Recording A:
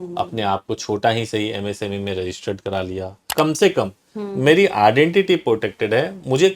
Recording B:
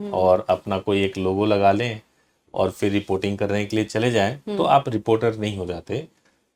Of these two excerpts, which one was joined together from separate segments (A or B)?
A